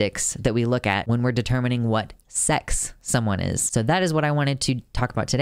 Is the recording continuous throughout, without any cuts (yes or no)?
no